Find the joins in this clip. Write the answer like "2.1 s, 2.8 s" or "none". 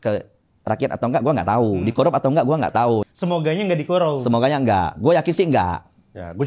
3.1 s